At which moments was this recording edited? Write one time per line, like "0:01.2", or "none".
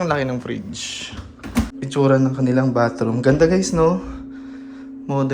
0:01.7